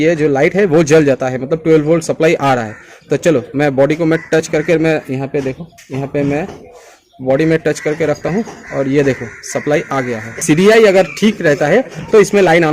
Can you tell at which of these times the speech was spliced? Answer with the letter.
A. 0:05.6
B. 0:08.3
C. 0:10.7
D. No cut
C